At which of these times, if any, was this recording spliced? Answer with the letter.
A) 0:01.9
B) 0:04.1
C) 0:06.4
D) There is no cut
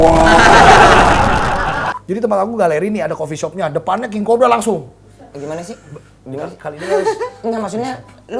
A